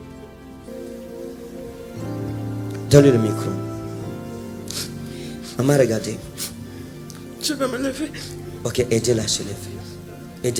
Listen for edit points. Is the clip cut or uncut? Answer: uncut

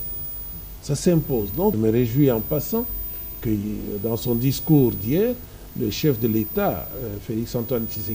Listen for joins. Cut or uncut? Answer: cut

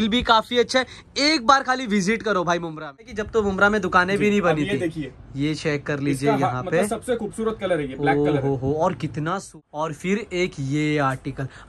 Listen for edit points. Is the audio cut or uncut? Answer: cut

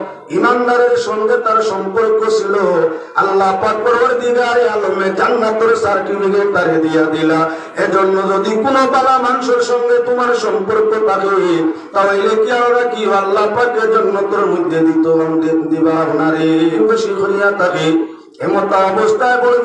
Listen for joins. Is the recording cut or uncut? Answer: cut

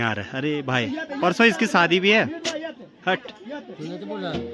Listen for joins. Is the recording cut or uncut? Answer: uncut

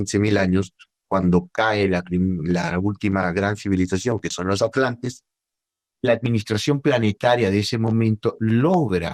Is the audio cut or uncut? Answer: uncut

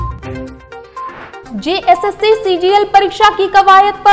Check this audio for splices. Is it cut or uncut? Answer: cut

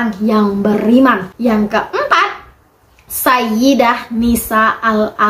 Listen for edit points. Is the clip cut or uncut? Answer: cut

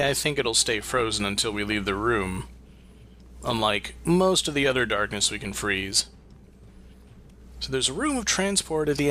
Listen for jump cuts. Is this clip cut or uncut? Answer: cut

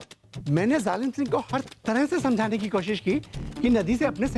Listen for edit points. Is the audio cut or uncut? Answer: uncut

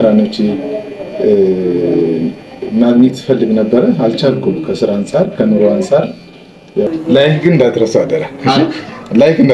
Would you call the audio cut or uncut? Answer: cut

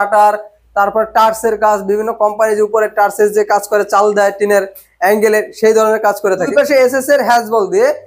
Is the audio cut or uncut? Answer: cut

